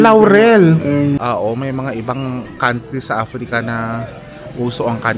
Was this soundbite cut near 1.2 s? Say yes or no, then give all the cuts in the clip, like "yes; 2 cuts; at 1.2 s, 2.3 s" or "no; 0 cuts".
yes; 1 cut; at 1.2 s